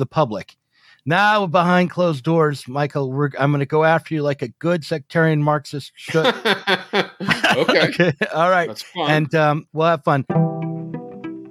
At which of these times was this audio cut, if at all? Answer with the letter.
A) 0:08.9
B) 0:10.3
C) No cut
B